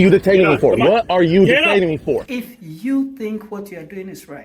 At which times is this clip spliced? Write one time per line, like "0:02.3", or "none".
0:02.3